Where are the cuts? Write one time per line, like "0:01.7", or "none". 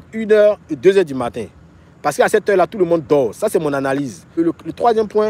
0:04.4